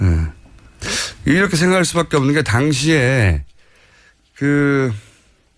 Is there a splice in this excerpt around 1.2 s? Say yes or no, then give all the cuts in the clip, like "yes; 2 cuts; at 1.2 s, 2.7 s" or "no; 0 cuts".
no; 1 cut; at 3.9 s